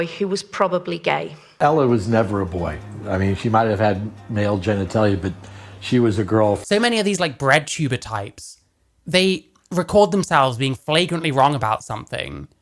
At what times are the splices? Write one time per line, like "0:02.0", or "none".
0:01.4
0:06.6